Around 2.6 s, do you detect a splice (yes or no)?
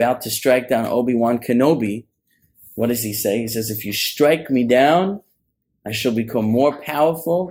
no